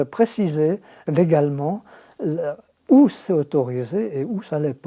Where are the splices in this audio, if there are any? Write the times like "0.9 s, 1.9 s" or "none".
1.1 s